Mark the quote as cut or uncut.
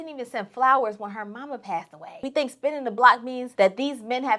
cut